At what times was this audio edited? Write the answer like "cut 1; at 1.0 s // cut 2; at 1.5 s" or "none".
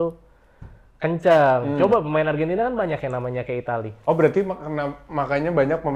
none